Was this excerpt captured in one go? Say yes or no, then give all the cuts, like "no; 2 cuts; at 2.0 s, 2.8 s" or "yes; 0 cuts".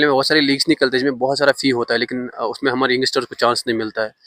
yes; 0 cuts